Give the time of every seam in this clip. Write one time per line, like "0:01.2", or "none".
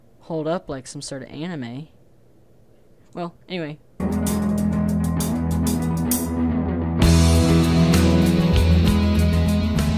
0:03.9